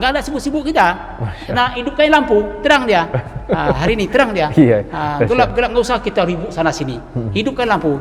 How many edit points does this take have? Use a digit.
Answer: 0